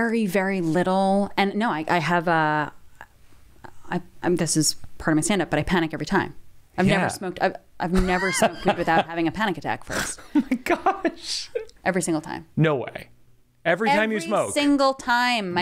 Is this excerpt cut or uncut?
cut